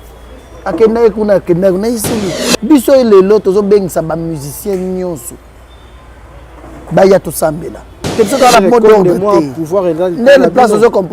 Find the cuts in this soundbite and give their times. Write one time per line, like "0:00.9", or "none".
0:02.4
0:08.0

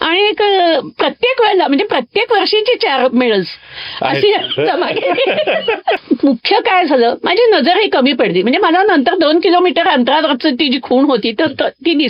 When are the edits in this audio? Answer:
0:06.0

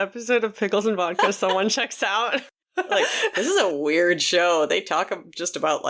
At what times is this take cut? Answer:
0:02.6

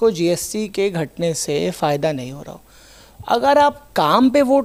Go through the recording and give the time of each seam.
none

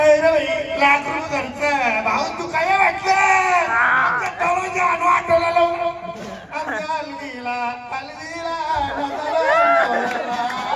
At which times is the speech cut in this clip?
none

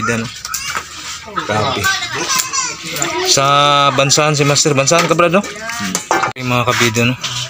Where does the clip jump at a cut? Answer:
0:06.3

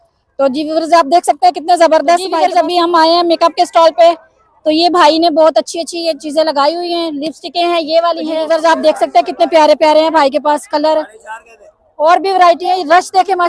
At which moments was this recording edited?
0:02.3
0:08.4

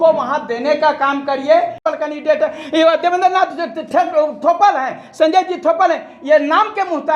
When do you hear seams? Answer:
0:01.8

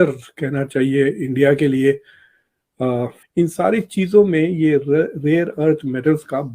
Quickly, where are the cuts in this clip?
0:03.2

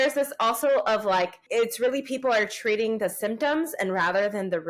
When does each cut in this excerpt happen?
0:01.4

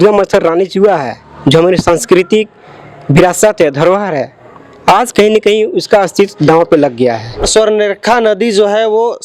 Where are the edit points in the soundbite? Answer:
0:07.5

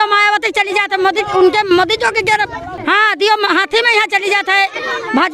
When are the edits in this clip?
0:02.8

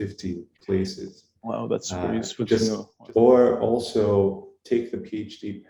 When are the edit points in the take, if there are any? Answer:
0:02.9

